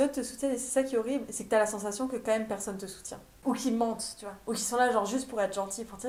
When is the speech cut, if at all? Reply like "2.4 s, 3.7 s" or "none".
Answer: none